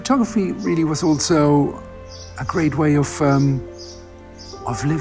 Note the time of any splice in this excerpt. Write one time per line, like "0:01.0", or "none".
none